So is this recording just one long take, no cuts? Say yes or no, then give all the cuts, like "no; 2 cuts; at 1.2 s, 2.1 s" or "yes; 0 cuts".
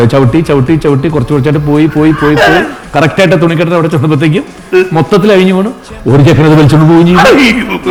yes; 0 cuts